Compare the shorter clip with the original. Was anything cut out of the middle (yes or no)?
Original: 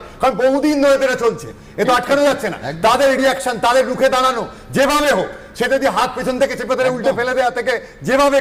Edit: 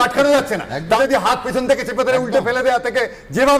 yes